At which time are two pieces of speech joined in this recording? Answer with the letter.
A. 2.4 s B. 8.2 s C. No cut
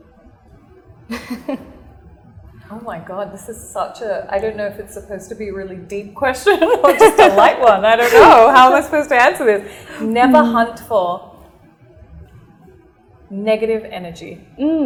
C